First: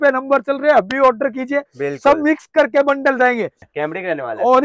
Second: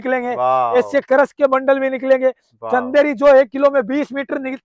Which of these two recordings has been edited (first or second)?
first